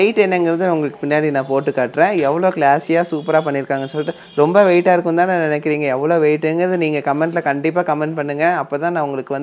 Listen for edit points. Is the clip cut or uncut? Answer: uncut